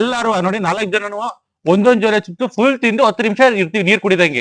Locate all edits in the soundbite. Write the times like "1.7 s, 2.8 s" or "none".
none